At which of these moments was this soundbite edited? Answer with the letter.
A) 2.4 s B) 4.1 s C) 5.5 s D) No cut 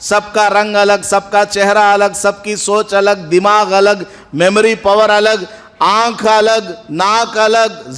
D